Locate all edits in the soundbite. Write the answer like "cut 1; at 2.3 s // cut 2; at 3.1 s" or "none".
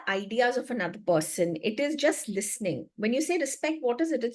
none

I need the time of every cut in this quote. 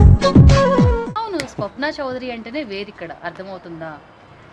cut 1; at 1.1 s

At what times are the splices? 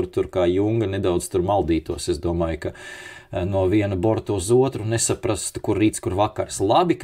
none

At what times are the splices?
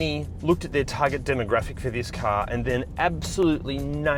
none

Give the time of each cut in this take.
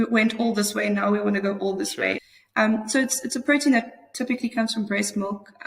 cut 1; at 2.3 s

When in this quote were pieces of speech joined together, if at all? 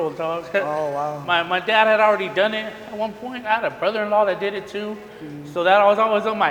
none

